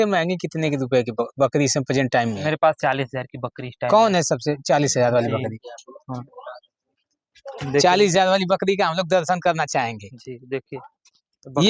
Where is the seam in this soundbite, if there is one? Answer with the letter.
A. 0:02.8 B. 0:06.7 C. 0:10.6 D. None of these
D